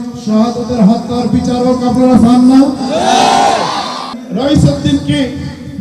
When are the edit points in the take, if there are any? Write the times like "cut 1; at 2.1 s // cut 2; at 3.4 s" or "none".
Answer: cut 1; at 4.1 s